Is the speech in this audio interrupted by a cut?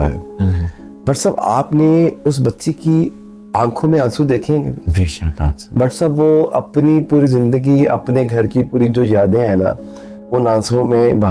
no; 0 cuts

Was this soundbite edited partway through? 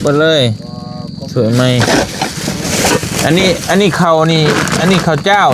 no; 0 cuts

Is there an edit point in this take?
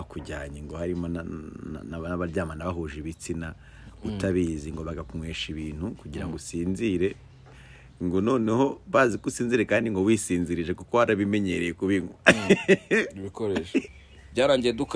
yes; 1 cut; at 13.9 s

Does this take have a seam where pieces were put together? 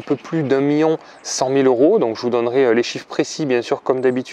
no; 0 cuts

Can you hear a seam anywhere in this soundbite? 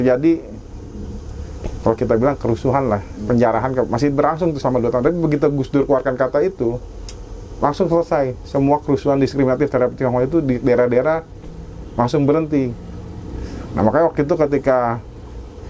no; 0 cuts

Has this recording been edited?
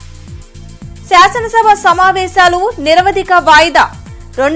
yes; 1 cut; at 0.9 s

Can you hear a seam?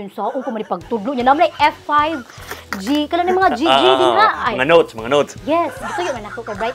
no; 0 cuts

